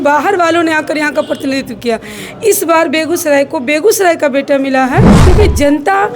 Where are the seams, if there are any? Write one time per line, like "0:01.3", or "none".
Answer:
0:05.1